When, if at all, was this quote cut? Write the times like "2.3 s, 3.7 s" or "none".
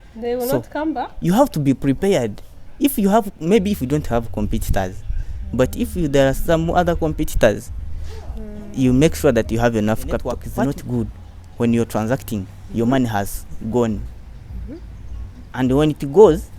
10.4 s